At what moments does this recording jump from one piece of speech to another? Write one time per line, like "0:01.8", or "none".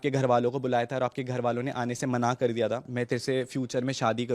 0:02.9